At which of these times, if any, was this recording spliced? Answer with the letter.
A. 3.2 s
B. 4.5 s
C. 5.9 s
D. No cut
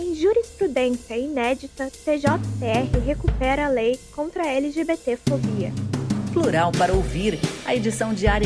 C